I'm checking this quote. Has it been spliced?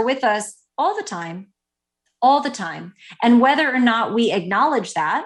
no; 0 cuts

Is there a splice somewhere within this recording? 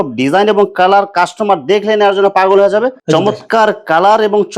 yes; 1 cut; at 2.9 s

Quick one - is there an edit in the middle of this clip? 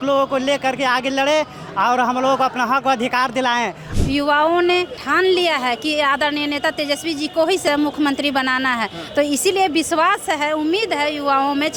yes; 3 cuts; at 3.9 s, 5.0 s, 7.6 s

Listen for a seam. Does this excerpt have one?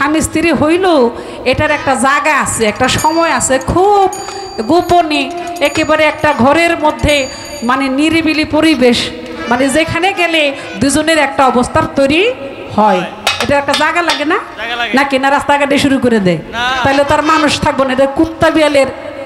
no; 0 cuts

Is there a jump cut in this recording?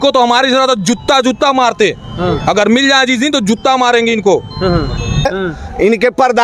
yes; 1 cut; at 5.3 s

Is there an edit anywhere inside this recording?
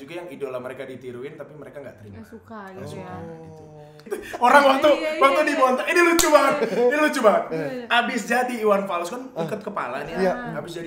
yes; 1 cut; at 4.0 s

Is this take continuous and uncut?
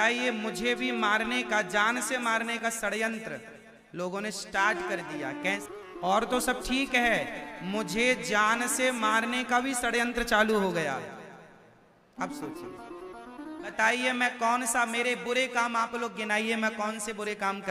no; 2 cuts; at 5.6 s, 13.7 s

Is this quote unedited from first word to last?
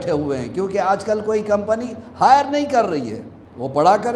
yes; 0 cuts

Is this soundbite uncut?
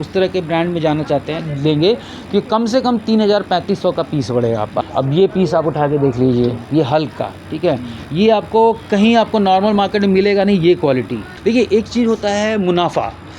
no; 2 cuts; at 4.8 s, 11.2 s

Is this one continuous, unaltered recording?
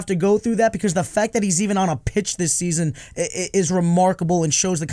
yes; 0 cuts

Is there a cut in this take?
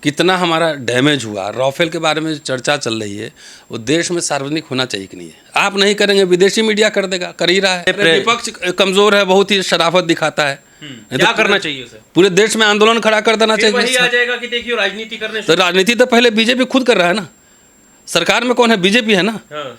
yes; 1 cut; at 7.9 s

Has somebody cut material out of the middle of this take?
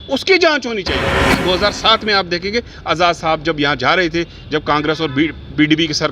yes; 1 cut; at 1.4 s

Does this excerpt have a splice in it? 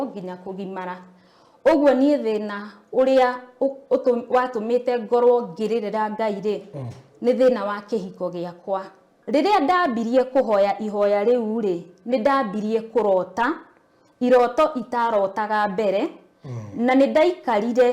yes; 1 cut; at 9.1 s

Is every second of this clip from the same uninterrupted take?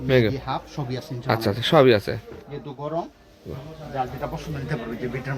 yes; 0 cuts

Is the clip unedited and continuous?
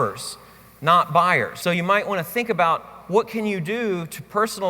no; 1 cut; at 1.5 s

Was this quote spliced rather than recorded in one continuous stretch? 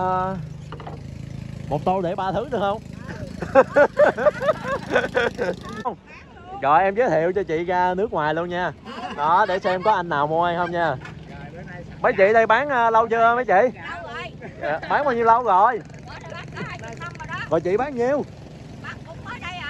yes; 1 cut; at 6.1 s

